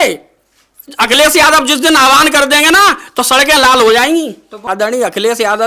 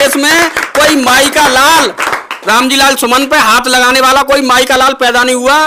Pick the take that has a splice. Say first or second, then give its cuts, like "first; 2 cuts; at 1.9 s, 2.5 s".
first; 1 cut; at 4.7 s